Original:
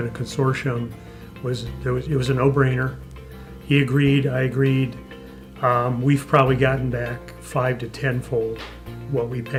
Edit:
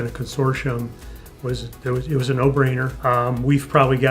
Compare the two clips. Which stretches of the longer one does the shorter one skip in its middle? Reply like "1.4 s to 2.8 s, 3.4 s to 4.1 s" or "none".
2.9 s to 5.5 s